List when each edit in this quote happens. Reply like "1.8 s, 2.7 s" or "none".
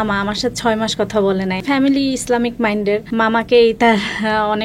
1.6 s, 3.1 s